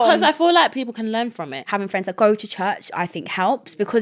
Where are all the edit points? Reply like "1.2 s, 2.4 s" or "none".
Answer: 1.7 s